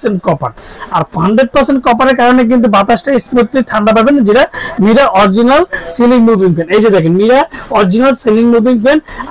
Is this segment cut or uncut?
uncut